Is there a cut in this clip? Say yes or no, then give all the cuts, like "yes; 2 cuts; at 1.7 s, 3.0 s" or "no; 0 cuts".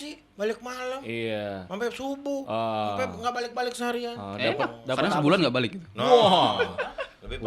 no; 0 cuts